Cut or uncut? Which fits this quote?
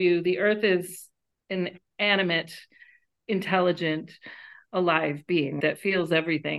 uncut